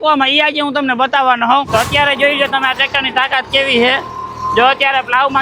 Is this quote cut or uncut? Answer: cut